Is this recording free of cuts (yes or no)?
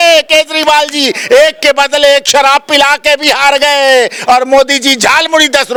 yes